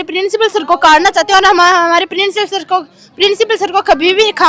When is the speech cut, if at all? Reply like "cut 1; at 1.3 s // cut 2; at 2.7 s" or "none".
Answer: none